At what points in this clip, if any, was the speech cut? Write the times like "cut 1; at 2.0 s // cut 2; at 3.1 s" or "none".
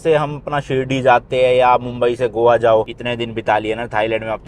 cut 1; at 3.0 s